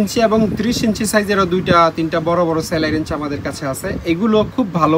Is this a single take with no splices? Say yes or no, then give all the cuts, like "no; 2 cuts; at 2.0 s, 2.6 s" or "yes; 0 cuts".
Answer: yes; 0 cuts